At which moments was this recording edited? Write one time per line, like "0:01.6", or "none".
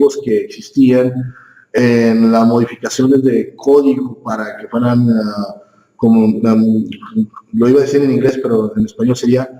0:03.2